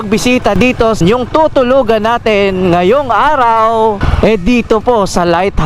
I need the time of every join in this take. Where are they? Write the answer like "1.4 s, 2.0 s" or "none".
1.0 s, 4.1 s